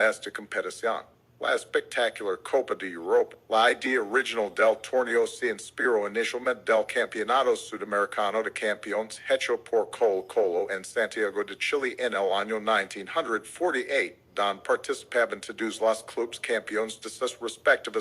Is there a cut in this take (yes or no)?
yes